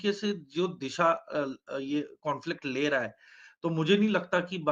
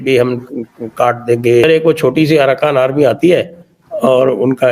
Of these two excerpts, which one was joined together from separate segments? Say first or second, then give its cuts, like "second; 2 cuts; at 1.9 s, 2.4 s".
second; 1 cut; at 1.6 s